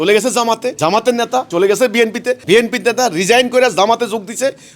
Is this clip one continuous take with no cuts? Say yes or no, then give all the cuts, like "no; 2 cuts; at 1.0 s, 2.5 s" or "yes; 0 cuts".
no; 2 cuts; at 1.1 s, 2.4 s